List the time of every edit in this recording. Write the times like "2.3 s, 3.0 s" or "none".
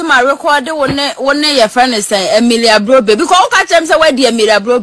none